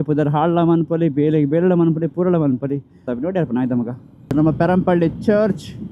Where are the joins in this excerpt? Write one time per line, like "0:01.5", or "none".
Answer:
0:03.1
0:04.3